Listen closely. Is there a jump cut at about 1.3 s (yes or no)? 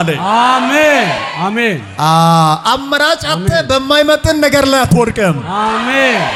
no